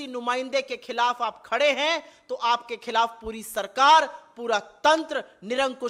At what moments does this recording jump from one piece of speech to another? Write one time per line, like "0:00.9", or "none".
none